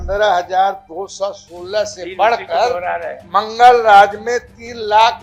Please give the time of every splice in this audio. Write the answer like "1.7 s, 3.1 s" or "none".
none